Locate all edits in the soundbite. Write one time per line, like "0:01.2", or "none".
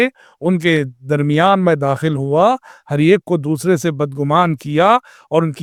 none